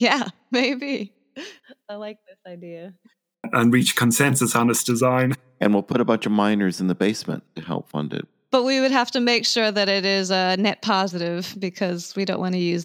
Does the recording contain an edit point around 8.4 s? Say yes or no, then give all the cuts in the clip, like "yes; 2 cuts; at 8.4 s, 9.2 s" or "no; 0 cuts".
yes; 2 cuts; at 5.3 s, 8.4 s